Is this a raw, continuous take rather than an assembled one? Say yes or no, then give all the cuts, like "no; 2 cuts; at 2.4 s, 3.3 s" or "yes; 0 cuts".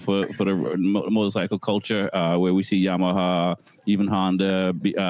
yes; 0 cuts